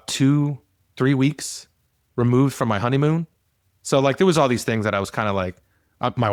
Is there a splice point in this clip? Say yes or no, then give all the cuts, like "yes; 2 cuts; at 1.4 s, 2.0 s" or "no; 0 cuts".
no; 0 cuts